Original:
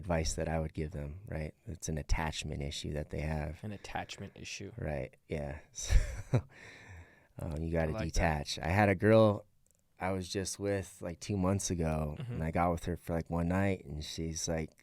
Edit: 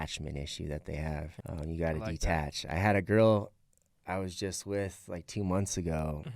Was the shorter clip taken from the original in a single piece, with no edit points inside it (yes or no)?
no